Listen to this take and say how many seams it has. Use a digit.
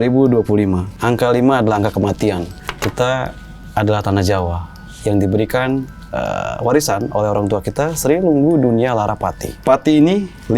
3